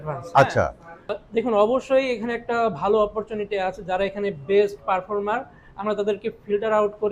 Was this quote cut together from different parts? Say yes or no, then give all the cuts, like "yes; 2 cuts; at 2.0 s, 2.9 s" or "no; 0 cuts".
yes; 1 cut; at 1.1 s